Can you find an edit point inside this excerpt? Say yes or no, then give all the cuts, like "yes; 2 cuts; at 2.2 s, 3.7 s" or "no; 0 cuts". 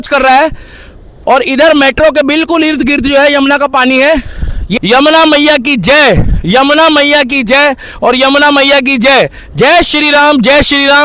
yes; 1 cut; at 4.6 s